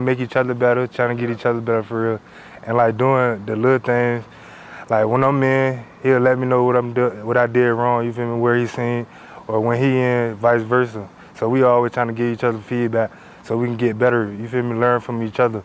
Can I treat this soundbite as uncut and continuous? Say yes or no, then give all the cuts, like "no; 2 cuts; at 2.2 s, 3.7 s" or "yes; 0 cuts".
yes; 0 cuts